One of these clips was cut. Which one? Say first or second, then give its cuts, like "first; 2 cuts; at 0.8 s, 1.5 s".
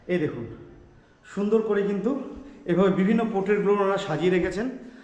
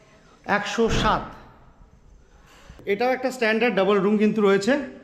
second; 1 cut; at 2.8 s